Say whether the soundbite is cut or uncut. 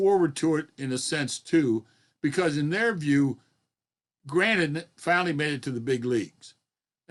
uncut